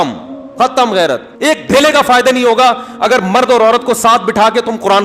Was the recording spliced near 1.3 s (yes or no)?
yes